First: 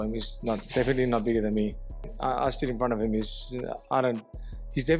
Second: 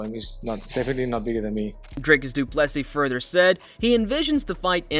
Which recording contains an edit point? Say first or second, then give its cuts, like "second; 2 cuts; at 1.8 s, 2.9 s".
first; 1 cut; at 1.9 s